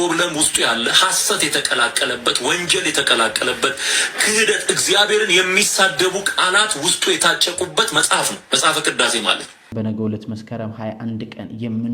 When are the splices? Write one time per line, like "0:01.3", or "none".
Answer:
0:09.7